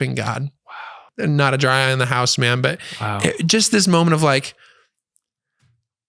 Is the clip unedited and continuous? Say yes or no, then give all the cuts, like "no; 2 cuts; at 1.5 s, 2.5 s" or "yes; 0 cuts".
no; 1 cut; at 1.0 s